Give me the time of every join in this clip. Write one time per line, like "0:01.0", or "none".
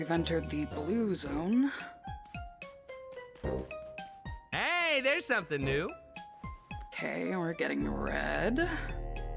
none